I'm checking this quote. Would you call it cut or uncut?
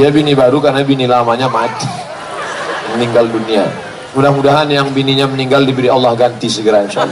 uncut